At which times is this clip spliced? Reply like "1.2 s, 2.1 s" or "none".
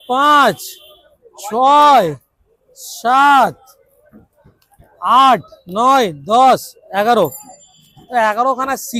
none

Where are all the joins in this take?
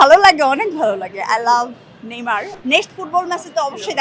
2.5 s

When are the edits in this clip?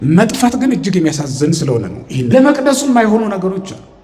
2.3 s

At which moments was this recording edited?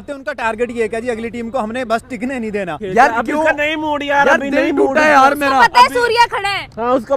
2.8 s

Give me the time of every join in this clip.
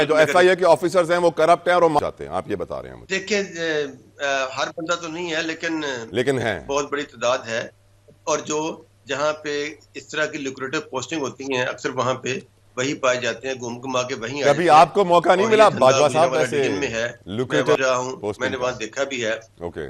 2.9 s

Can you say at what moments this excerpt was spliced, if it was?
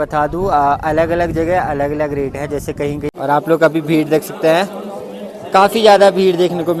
3.2 s

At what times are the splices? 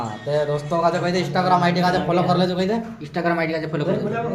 none

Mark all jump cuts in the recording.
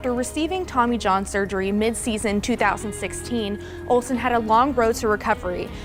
none

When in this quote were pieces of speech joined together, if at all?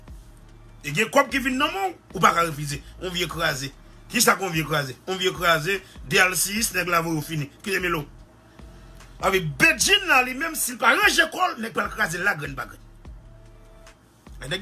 none

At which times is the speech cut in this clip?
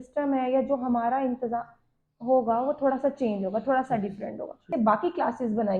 4.7 s

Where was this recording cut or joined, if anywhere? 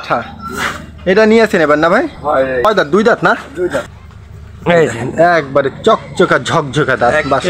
2.7 s, 3.9 s

